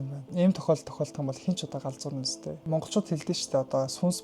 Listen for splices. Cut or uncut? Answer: cut